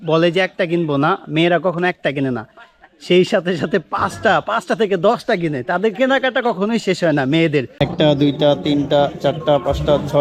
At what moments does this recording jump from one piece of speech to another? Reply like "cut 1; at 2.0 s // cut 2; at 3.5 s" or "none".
cut 1; at 7.7 s